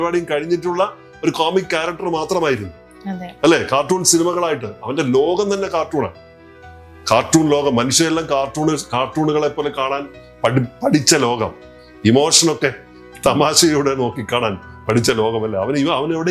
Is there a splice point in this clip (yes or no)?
no